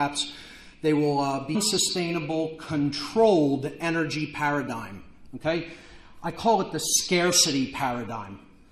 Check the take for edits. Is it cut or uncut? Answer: uncut